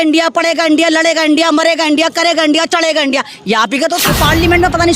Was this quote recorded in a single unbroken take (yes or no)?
no